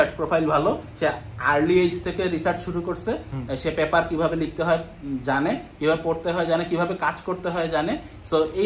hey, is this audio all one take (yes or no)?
yes